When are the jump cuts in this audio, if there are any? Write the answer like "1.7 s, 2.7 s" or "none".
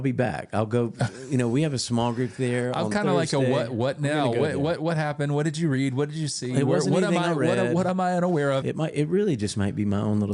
8.6 s